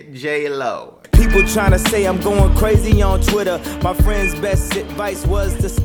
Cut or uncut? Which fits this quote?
cut